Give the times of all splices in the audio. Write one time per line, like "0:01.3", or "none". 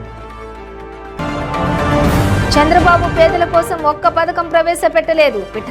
0:01.1

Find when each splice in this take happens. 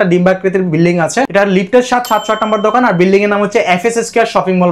0:01.3

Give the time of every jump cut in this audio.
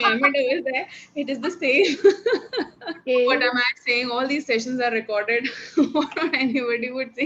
0:03.0

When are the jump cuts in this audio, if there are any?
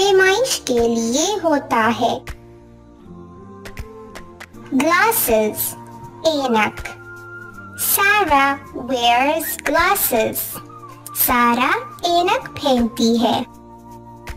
0:02.2
0:04.7
0:13.5

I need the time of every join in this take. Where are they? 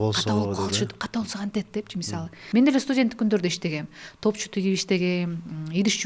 0:02.4

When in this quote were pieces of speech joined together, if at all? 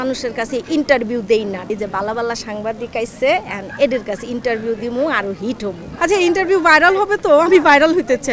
0:01.7
0:05.9

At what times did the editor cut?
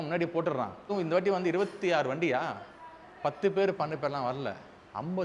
0:00.9

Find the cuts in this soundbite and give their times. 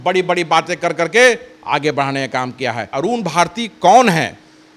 0:02.9

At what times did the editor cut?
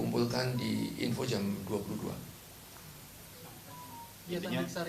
0:02.1

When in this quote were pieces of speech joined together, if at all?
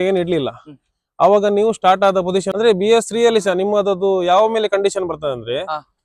0:02.5

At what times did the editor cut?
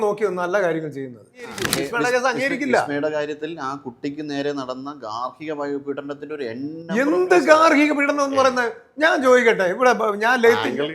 0:01.7

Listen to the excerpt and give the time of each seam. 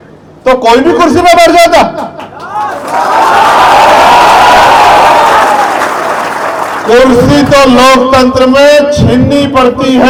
none

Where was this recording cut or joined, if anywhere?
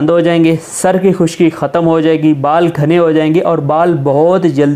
none

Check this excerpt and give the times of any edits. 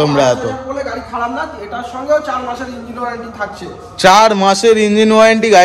none

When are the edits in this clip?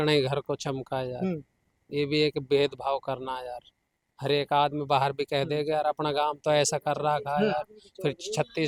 none

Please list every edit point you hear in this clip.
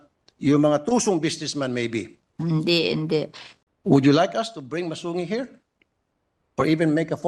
0:03.4

